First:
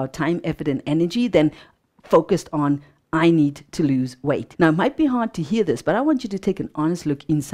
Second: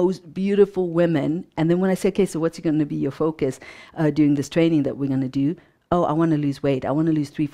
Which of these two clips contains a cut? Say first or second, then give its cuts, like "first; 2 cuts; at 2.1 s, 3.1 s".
first; 1 cut; at 4.5 s